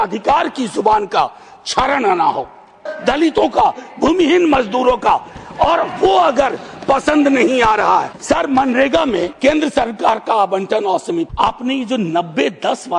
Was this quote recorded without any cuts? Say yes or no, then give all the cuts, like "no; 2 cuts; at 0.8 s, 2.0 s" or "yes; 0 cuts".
no; 4 cuts; at 2.9 s, 8.1 s, 9.3 s, 11.3 s